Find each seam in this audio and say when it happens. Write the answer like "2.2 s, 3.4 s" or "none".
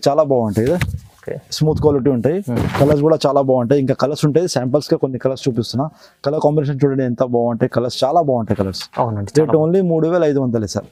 none